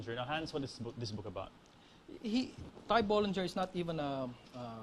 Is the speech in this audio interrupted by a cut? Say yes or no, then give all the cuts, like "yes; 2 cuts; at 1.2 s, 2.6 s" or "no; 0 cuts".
yes; 1 cut; at 2.8 s